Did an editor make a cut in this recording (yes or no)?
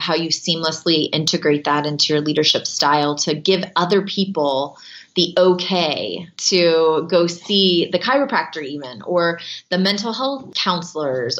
yes